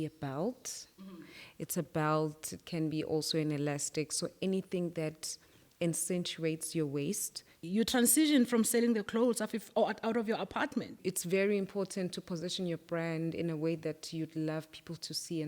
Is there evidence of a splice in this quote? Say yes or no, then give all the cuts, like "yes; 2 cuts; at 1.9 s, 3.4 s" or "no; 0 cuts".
yes; 2 cuts; at 7.6 s, 11.0 s